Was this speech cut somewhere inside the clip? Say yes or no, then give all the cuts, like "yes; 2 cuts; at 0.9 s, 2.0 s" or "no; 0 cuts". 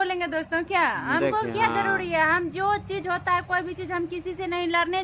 no; 0 cuts